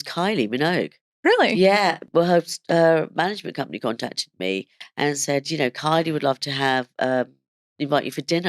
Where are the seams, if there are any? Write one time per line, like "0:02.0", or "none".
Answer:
0:02.0